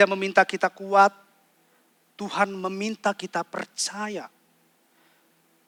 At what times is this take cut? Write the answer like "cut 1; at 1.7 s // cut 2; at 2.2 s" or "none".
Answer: none